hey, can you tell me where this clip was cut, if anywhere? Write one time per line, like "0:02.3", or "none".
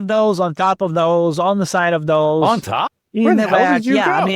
0:03.0